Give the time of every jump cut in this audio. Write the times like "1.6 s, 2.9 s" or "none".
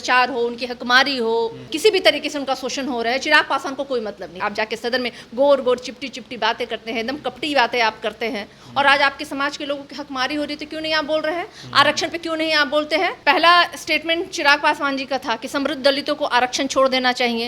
1.7 s, 4.4 s, 13.2 s